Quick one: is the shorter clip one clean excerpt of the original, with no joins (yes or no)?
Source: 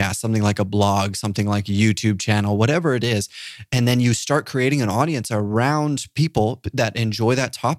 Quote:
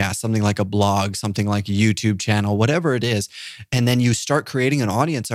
yes